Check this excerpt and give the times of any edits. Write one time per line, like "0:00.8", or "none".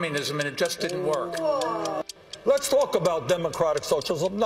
0:02.0

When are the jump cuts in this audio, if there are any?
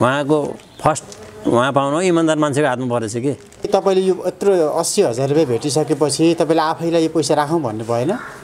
0:03.7

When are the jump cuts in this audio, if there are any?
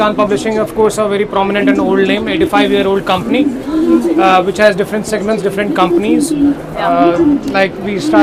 none

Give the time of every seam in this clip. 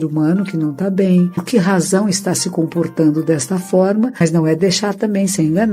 0:01.4
0:04.2

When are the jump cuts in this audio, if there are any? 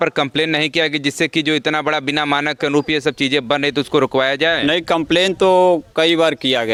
none

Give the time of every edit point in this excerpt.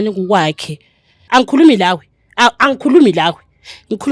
0:01.2

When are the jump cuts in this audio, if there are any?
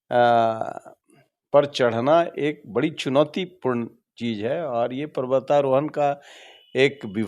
none

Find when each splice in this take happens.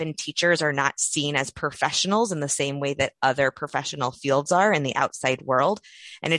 none

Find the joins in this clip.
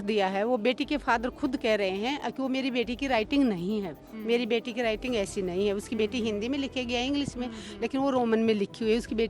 none

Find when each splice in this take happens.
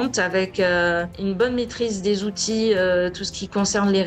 0:01.1

